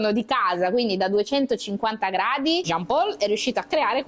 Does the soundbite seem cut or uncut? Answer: cut